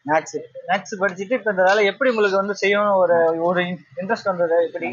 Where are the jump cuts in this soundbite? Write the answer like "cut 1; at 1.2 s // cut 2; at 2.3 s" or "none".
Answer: none

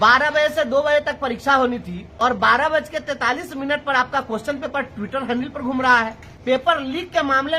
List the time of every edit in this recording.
cut 1; at 1.5 s // cut 2; at 6.6 s

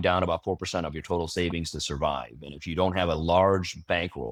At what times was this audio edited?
none

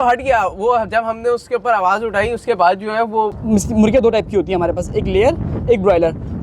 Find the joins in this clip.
cut 1; at 3.4 s

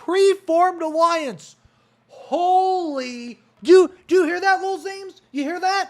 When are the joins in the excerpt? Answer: cut 1; at 3.5 s

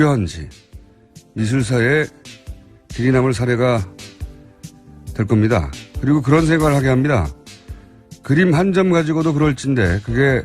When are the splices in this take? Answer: cut 1; at 1.5 s

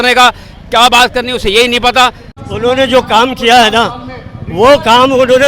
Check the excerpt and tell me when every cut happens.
cut 1; at 2.3 s

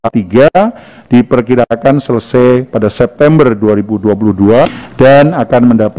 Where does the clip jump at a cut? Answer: cut 1; at 4.7 s

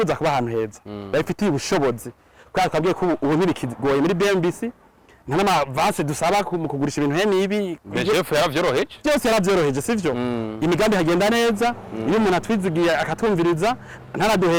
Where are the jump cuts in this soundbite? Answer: none

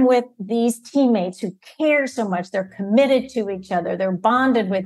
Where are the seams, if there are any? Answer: none

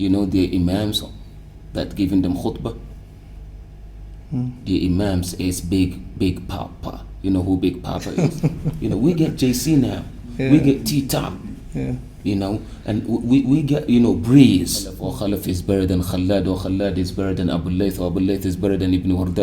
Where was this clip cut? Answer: cut 1; at 8.1 s // cut 2; at 15.1 s

